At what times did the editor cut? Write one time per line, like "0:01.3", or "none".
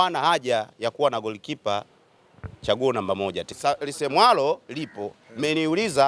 0:03.5